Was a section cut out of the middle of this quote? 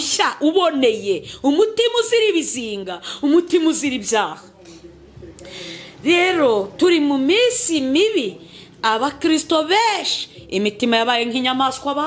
no; 0 cuts

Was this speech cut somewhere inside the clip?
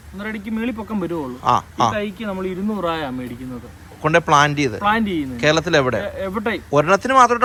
no; 0 cuts

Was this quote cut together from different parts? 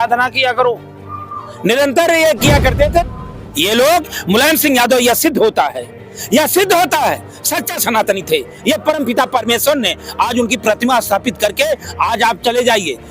yes; 1 cut; at 3.0 s

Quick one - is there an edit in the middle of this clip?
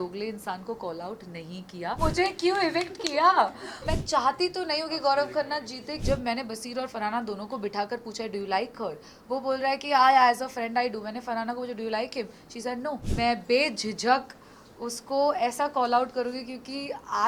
yes; 4 cuts; at 2.0 s, 3.8 s, 5.9 s, 13.1 s

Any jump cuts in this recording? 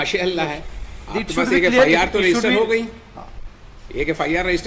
no; 0 cuts

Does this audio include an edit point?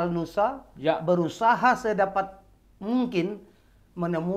no; 0 cuts

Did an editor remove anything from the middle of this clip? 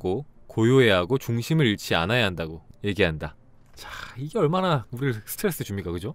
yes; 1 cut; at 2.7 s

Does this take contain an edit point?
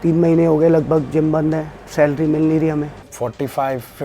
yes; 1 cut; at 3.0 s

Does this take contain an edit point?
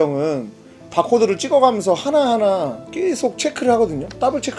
no; 0 cuts

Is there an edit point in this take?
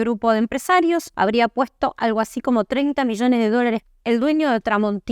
yes; 2 cuts; at 1.1 s, 3.8 s

